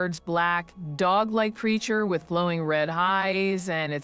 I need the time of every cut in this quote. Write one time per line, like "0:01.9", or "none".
none